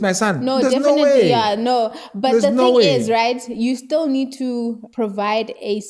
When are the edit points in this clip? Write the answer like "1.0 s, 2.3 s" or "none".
4.8 s